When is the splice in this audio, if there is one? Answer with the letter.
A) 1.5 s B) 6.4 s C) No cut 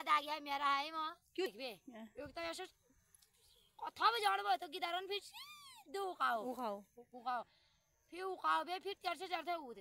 A